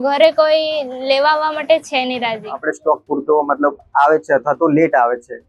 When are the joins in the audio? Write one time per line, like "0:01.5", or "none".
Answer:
0:02.6